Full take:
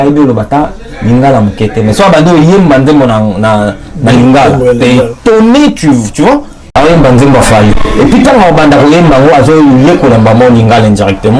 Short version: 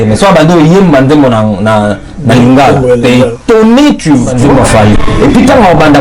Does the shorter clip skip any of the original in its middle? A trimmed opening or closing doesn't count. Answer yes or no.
yes